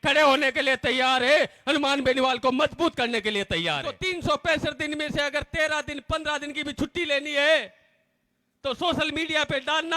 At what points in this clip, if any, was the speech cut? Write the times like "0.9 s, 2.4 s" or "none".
4.0 s